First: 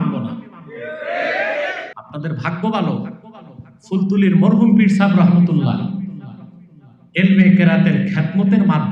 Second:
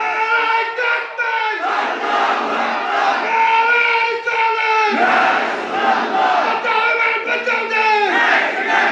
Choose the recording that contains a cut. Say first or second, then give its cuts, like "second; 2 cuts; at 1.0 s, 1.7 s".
first; 1 cut; at 1.9 s